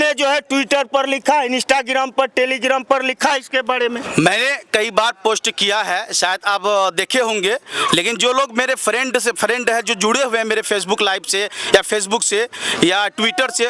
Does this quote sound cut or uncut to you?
uncut